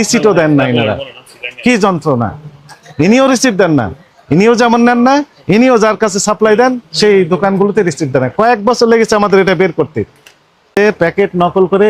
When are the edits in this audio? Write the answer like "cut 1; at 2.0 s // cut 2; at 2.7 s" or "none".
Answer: cut 1; at 10.8 s